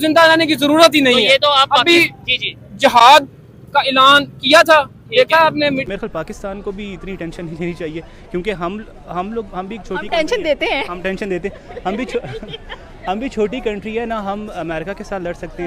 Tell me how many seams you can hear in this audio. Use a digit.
1